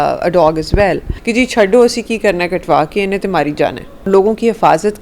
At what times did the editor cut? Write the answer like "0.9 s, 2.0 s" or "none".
1.1 s, 4.1 s